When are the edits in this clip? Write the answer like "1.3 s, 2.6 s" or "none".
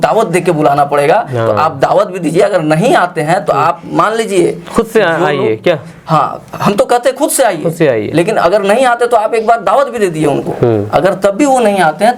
none